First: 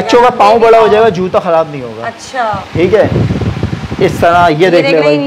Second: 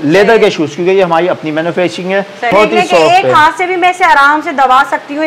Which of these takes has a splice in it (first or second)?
second